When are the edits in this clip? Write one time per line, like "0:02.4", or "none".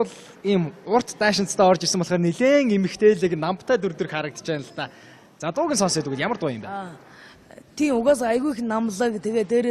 0:08.6

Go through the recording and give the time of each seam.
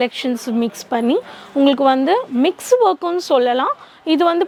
none

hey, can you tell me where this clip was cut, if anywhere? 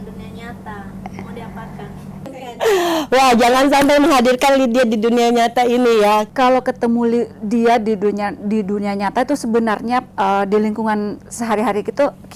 0:02.1
0:06.3

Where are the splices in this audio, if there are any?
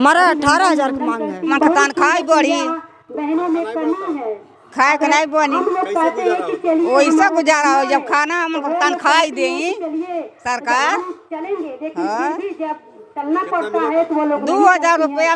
0:01.5

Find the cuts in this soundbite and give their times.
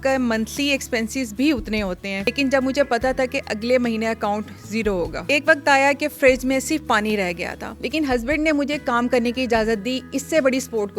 0:02.2
0:05.2
0:07.6

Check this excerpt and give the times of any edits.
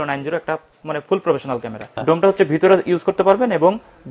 0:02.0

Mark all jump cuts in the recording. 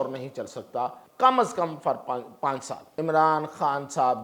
0:01.0
0:02.8

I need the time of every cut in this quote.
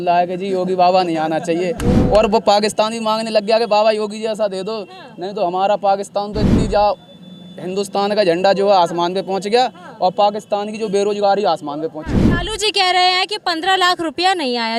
none

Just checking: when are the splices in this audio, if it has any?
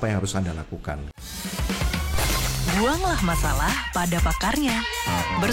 0:01.2

